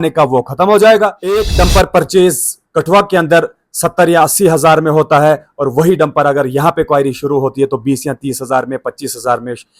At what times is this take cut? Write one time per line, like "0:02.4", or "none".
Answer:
0:01.4